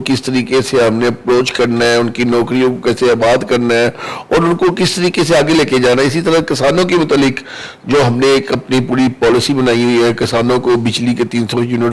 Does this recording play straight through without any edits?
yes; 0 cuts

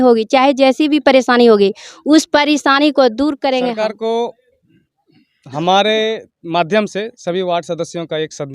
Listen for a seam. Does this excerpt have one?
yes; 1 cut; at 3.7 s

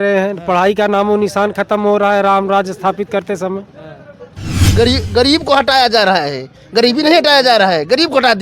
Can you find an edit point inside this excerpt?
yes; 1 cut; at 4.7 s

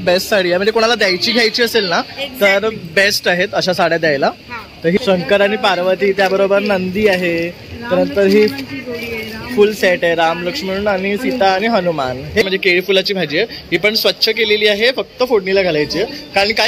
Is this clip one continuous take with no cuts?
no; 2 cuts; at 5.0 s, 12.4 s

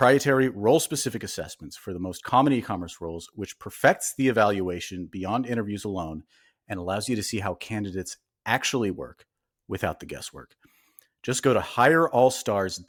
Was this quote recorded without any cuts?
yes; 0 cuts

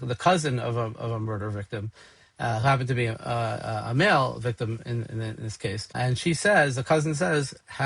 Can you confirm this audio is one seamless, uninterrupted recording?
yes; 0 cuts

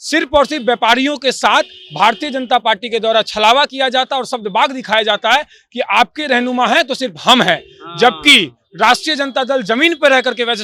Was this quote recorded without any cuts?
yes; 0 cuts

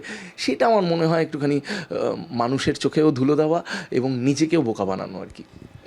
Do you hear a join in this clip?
no; 0 cuts

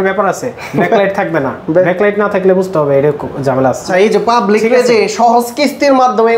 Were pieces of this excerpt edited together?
yes; 1 cut; at 3.8 s

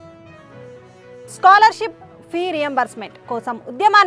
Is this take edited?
yes; 1 cut; at 1.2 s

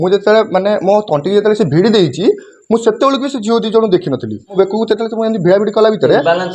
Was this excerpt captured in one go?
no; 1 cut; at 4.5 s

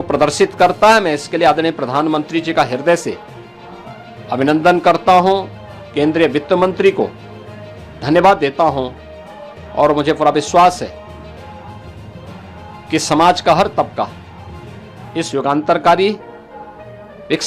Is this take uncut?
yes; 0 cuts

